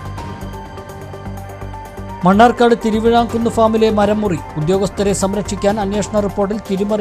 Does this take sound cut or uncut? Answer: cut